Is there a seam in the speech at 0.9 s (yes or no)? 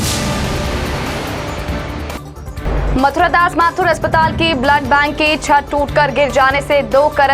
yes